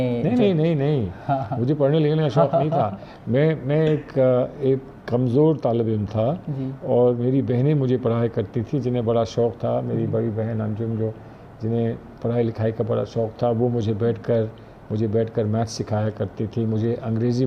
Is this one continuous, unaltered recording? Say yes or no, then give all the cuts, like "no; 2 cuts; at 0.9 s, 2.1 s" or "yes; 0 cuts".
yes; 0 cuts